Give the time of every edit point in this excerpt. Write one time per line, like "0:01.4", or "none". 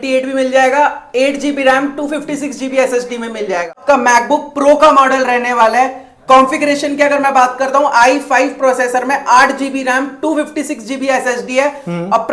0:03.8